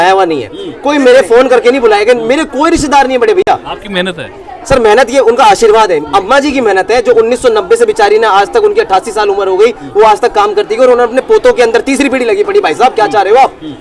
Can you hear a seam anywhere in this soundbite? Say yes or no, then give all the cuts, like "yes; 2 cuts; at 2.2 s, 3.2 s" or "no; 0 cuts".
no; 0 cuts